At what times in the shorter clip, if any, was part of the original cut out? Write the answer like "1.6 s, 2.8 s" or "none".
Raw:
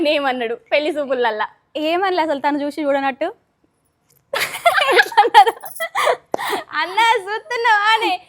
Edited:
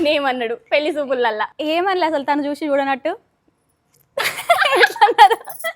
1.5 s